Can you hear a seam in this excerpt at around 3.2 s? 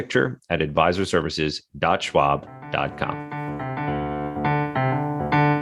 yes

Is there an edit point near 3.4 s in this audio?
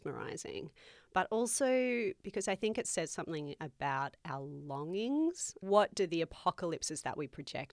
no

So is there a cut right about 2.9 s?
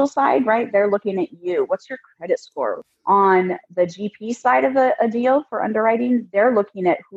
yes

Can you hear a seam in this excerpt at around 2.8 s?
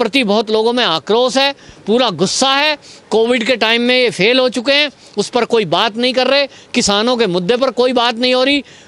no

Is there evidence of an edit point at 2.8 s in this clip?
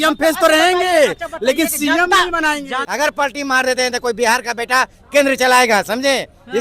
yes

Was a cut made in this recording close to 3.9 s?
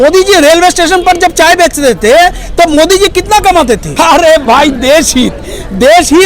yes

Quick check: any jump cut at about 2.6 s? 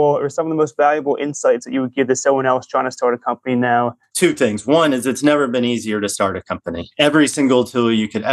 no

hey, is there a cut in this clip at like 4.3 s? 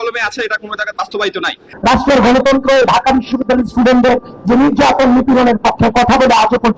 no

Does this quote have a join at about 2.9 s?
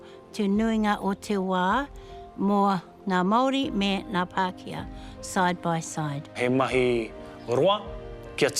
yes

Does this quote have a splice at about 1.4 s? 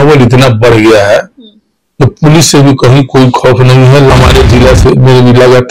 no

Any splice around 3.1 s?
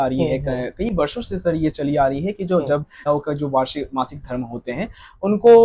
yes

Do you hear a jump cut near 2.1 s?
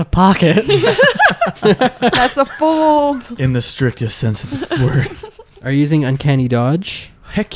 no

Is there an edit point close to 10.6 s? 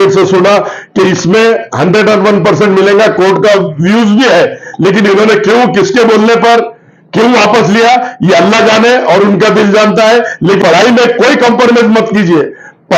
yes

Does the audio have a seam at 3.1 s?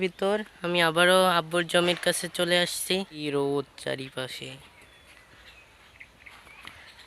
yes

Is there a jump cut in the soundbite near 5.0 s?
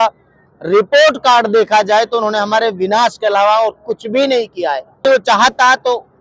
yes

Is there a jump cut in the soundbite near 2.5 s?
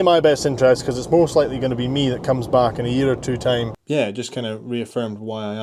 no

